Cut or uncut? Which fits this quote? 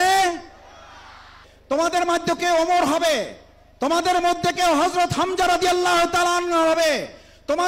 cut